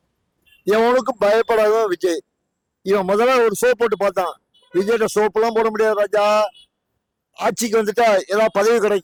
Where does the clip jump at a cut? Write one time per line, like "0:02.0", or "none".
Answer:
none